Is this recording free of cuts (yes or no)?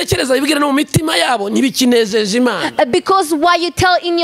yes